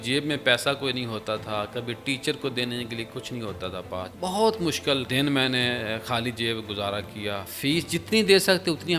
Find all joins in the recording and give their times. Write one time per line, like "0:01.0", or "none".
0:04.1
0:05.1
0:07.5